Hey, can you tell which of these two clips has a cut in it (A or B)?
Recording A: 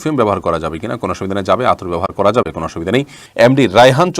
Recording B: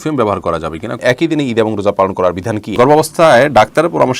B